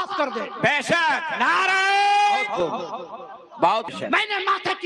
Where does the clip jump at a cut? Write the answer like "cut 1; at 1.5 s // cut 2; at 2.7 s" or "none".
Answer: cut 1; at 2.6 s // cut 2; at 3.9 s